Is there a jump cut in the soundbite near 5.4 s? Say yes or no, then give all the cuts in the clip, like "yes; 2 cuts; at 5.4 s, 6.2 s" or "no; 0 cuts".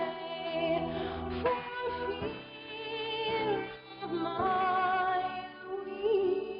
no; 1 cut; at 1.8 s